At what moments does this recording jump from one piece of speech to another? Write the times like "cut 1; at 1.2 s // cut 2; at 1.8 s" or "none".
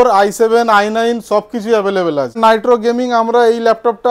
cut 1; at 2.4 s